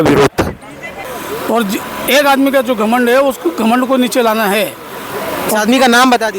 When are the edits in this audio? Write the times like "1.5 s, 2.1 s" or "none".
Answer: 1.0 s